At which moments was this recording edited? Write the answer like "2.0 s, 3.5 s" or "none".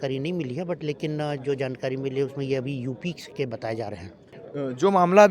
4.3 s